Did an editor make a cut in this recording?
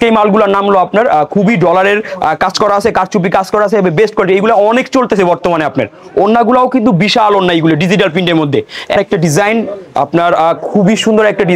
no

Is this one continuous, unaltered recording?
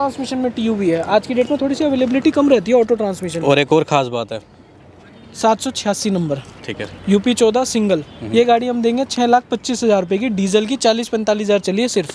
yes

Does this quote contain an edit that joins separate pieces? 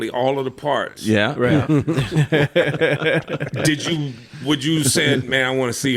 no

